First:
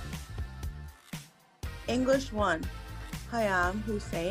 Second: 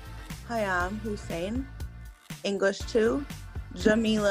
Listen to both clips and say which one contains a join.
first; 1 cut; at 1.8 s

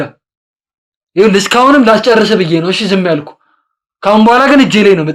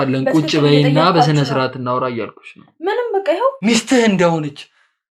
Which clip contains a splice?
second; 1 cut; at 3.6 s

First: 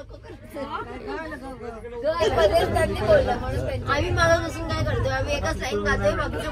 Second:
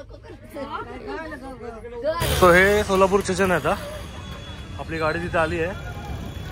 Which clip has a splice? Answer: second; 1 cut; at 2.2 s

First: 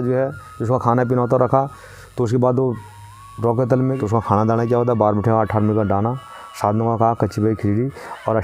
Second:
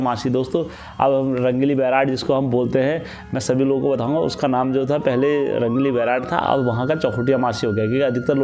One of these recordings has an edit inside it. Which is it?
first; 1 cut; at 4.0 s

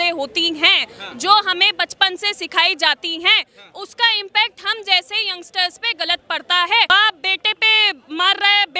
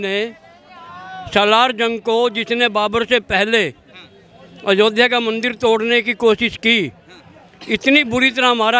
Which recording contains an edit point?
first; 1 cut; at 6.9 s

